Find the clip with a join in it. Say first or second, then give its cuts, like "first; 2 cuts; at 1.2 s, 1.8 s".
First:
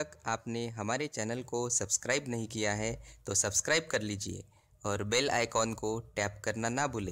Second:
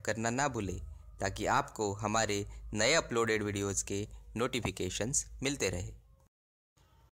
second; 1 cut; at 2.6 s